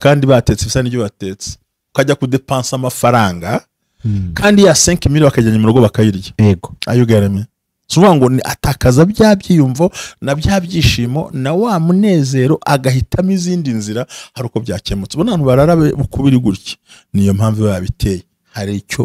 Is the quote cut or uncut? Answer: uncut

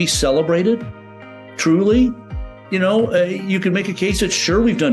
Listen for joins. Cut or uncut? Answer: uncut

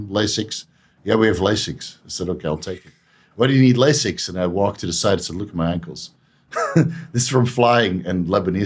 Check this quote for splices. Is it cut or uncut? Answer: uncut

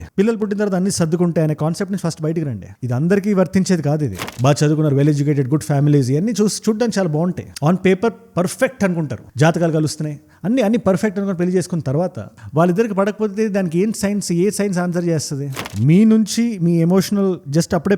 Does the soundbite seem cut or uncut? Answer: cut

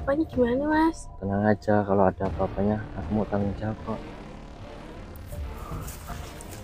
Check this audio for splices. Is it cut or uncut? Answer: cut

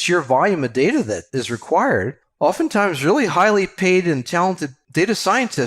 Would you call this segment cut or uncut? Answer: cut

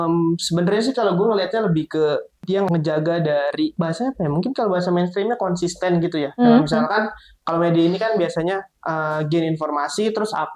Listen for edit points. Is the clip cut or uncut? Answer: cut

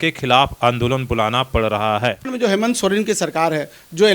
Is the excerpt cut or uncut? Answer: cut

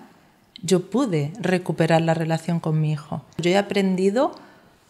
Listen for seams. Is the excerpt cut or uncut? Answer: cut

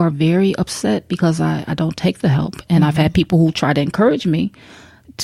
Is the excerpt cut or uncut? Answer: uncut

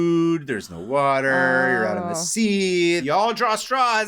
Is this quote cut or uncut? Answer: cut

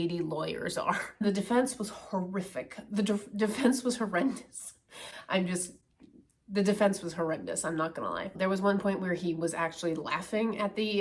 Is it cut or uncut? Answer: cut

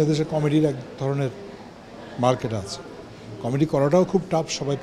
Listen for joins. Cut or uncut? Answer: uncut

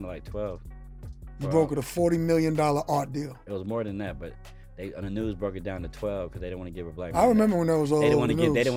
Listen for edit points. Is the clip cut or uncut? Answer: uncut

